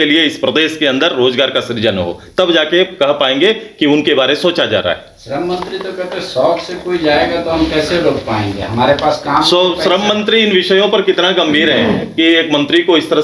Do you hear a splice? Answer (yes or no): no